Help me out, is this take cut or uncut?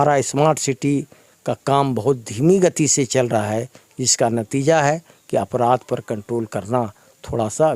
uncut